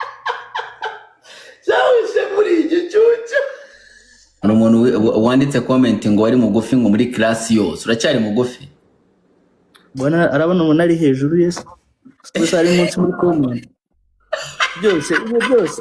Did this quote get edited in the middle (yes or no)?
yes